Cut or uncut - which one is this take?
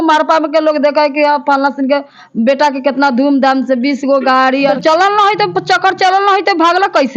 cut